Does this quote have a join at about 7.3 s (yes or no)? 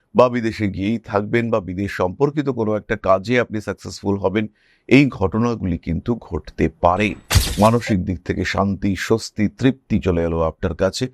yes